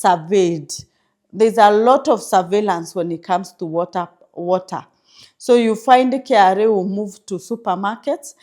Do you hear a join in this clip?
no; 0 cuts

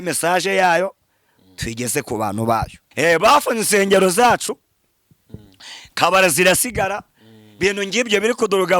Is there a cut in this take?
yes; 1 cut; at 2.8 s

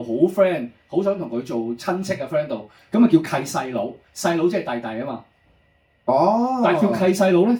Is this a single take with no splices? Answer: yes; 0 cuts

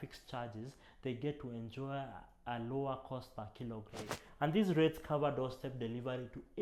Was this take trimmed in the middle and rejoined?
yes; 1 cut; at 4.2 s

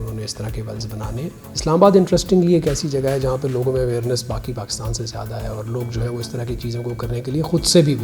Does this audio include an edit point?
no; 0 cuts

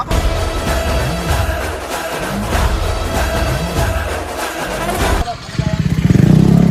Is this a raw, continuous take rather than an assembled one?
yes; 0 cuts

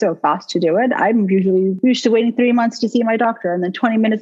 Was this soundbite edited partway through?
yes; 1 cut; at 1.7 s

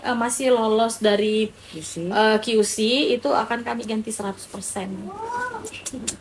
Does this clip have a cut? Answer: no; 0 cuts

